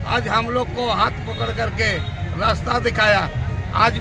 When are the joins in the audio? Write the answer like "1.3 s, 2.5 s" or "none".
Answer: none